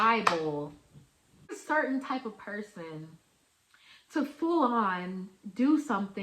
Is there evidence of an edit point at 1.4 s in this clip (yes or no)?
yes